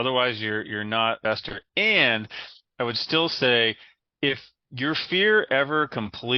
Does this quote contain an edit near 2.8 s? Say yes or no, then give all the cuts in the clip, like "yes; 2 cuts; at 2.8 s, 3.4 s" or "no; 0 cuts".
no; 1 cut; at 1.2 s